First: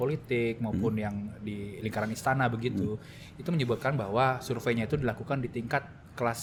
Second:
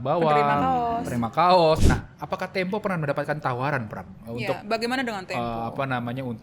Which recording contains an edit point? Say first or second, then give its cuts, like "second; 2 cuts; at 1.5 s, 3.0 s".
second; 1 cut; at 1.8 s